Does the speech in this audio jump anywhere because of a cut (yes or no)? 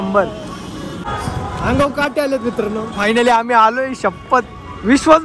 yes